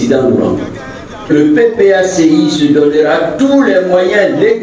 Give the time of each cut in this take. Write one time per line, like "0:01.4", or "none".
0:01.3